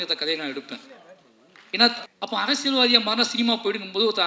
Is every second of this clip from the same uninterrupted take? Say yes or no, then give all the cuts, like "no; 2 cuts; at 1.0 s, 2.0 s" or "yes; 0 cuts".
no; 1 cut; at 2.0 s